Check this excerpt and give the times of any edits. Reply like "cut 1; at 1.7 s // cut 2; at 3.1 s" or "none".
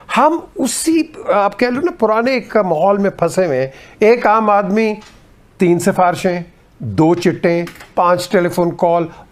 none